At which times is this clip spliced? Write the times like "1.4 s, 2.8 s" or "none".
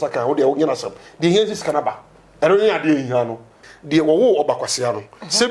3.6 s